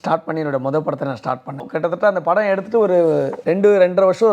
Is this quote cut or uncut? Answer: cut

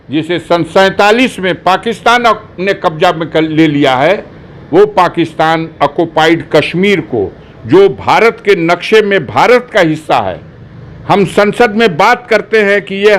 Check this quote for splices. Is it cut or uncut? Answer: uncut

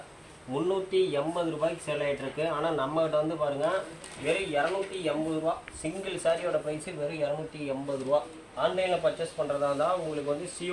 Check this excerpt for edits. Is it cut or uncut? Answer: cut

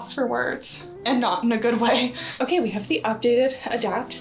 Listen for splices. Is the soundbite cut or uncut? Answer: cut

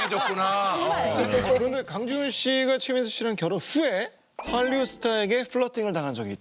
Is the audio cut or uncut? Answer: cut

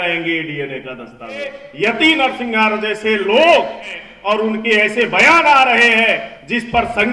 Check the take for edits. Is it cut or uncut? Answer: cut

